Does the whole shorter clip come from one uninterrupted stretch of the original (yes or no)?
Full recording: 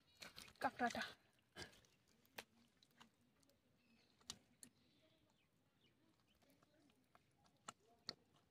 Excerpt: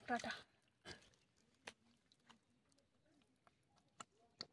no